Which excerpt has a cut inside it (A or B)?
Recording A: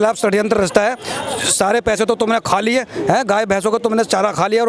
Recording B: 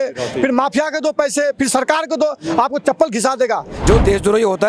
B